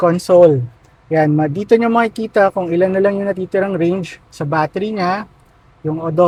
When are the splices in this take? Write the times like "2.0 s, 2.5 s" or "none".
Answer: none